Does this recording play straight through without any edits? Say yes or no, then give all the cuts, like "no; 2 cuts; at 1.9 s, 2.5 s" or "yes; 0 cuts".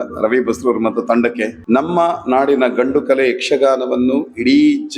no; 1 cut; at 1.5 s